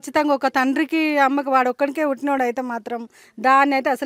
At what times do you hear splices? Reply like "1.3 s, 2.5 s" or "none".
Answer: none

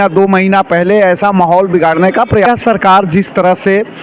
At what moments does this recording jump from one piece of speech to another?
2.5 s

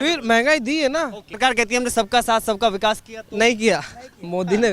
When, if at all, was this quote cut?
1.2 s

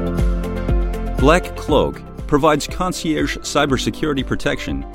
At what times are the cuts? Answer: 1.2 s

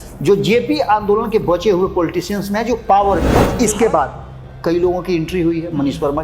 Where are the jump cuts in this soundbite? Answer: 3.3 s

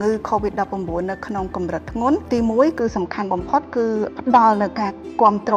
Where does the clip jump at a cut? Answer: 2.3 s, 4.1 s

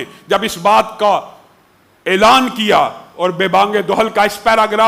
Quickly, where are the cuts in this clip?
none

